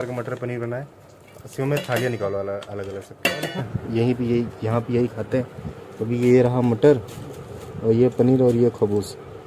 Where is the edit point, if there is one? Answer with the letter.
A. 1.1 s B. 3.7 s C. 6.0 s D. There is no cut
B